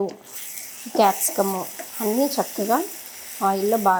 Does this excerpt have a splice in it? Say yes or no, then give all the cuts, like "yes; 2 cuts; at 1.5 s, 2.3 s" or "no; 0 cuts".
no; 0 cuts